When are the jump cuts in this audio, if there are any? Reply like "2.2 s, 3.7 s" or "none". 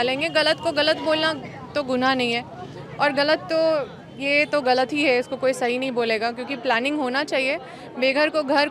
none